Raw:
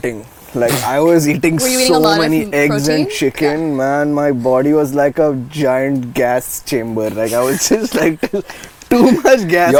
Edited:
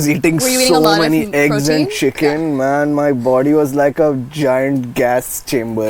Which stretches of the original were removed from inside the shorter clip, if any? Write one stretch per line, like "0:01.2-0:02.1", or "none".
none